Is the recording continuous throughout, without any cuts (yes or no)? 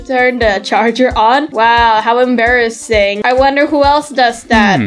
no